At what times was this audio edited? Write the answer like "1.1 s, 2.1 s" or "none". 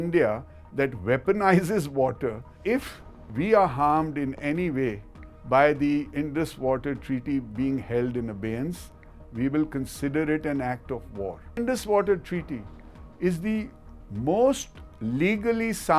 2.5 s, 11.6 s